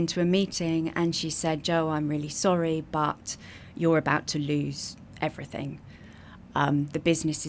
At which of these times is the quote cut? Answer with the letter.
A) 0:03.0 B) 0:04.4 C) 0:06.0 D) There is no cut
D